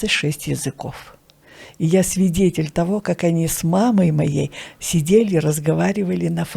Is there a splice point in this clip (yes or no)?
no